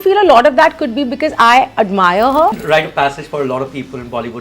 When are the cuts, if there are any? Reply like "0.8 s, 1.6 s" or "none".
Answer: 2.6 s